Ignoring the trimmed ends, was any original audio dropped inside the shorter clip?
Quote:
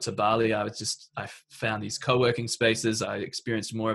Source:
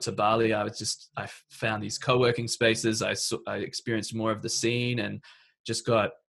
yes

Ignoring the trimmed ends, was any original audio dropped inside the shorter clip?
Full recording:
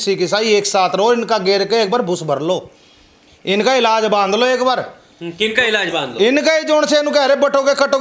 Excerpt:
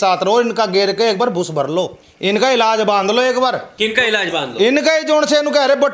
yes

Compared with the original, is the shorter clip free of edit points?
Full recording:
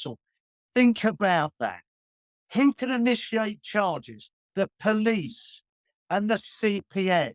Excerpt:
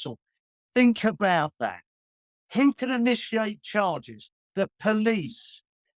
yes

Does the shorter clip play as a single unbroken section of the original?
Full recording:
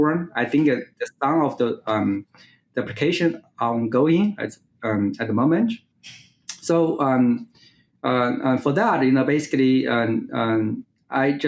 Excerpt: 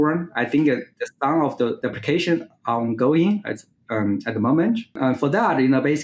no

